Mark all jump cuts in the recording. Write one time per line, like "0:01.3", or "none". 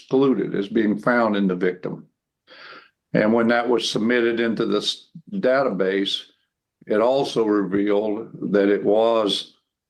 none